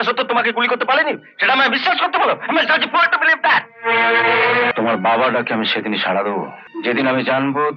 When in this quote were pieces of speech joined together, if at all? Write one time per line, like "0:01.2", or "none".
0:04.7
0:06.6